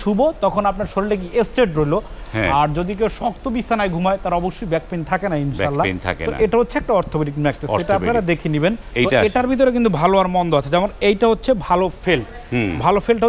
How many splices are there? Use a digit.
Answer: 1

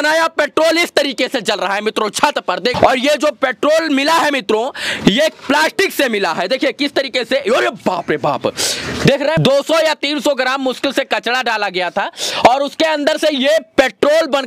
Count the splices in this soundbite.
2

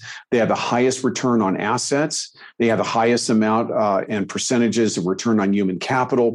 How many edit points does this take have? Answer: 0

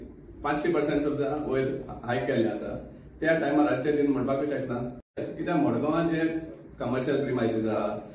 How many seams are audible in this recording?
1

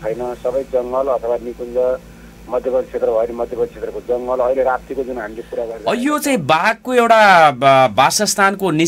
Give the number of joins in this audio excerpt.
1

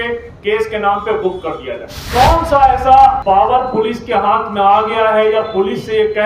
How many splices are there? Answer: 2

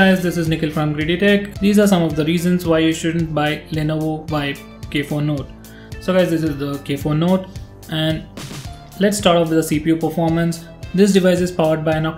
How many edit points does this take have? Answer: 0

